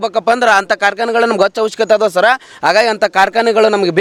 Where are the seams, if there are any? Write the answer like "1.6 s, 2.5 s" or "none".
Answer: none